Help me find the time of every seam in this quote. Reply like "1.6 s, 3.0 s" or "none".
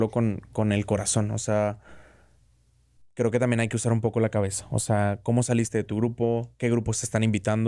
none